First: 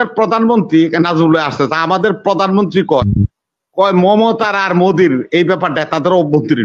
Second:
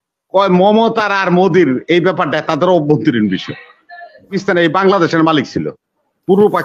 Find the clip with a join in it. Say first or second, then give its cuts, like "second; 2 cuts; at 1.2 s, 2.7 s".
second; 1 cut; at 4.4 s